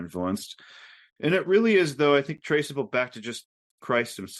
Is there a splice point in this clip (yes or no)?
no